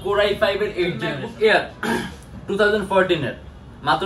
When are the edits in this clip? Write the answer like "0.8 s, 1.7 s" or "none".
1.2 s